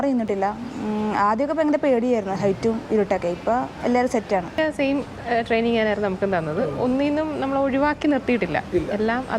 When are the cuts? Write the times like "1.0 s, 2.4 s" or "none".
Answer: 4.6 s